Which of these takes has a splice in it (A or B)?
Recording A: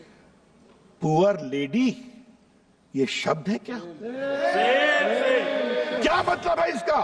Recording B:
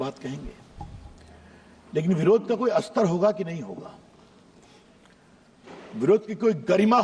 A